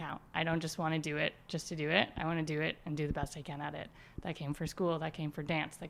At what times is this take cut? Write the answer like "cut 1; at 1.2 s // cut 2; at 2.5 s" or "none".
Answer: none